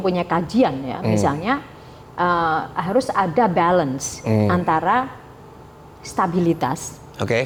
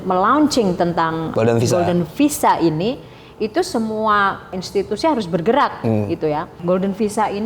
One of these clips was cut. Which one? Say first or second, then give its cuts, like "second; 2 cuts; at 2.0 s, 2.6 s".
second; 3 cuts; at 1.3 s, 4.6 s, 6.5 s